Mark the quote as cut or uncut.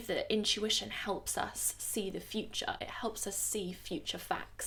uncut